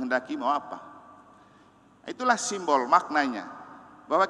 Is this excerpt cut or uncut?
uncut